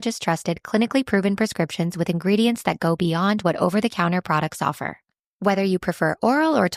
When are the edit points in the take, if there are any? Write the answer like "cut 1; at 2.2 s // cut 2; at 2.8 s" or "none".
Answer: none